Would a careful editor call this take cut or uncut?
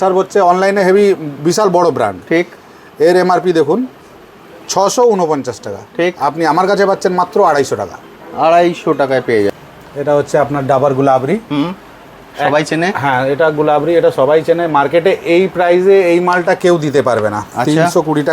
cut